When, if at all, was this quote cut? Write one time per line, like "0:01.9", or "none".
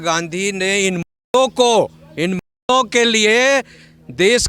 none